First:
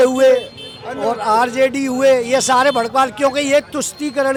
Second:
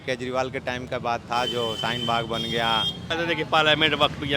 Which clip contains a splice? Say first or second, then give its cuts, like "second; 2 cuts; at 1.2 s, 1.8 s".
second; 1 cut; at 3.1 s